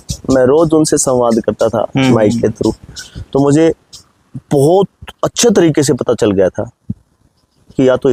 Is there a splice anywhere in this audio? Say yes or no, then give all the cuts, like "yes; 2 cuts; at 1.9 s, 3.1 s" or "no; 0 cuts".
no; 0 cuts